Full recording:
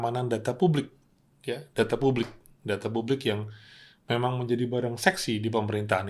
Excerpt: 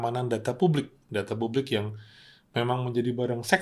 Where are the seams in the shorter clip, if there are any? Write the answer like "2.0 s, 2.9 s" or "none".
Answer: 1.0 s